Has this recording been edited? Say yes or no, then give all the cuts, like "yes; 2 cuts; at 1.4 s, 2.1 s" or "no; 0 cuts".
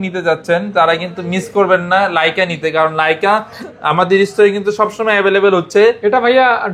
no; 0 cuts